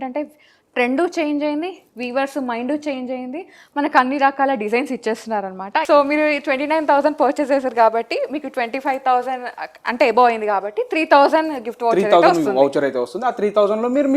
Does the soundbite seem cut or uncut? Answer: cut